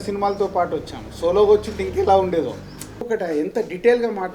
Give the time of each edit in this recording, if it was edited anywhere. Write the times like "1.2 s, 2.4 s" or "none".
3.1 s